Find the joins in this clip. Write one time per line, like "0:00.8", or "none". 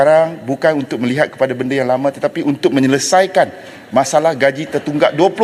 none